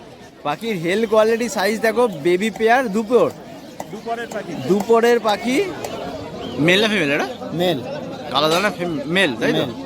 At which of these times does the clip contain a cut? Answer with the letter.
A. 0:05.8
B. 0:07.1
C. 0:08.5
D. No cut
A